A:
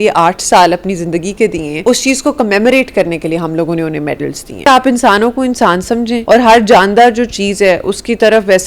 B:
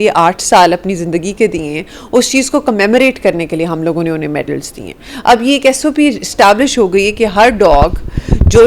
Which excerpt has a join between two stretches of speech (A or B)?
A